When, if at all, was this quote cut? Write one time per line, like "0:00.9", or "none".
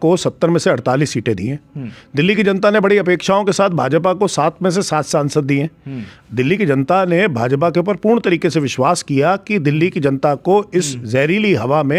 none